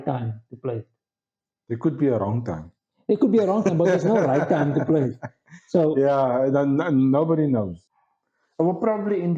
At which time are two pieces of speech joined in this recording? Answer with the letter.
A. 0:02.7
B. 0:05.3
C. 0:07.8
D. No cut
C